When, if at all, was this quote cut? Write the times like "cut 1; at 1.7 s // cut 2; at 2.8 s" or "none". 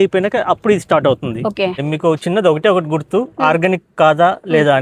cut 1; at 1.8 s